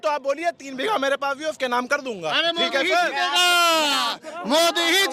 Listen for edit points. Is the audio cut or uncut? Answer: uncut